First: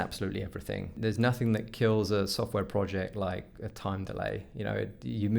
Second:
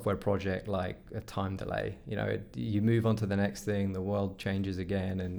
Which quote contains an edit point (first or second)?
first